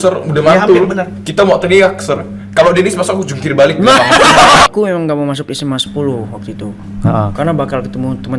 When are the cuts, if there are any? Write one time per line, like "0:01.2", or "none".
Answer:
0:04.7